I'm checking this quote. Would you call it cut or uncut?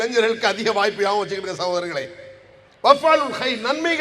uncut